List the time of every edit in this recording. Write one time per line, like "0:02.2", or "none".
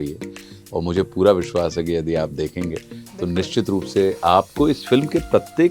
none